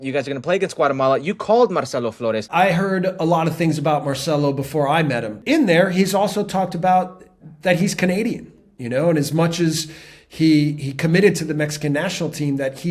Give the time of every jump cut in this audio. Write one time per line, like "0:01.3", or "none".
0:02.4
0:05.3